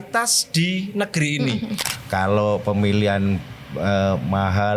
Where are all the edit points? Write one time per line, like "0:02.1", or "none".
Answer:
0:01.9